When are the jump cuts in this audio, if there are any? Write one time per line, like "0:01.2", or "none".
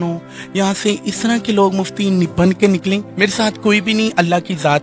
0:03.1